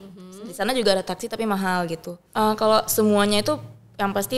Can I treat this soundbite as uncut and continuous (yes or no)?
no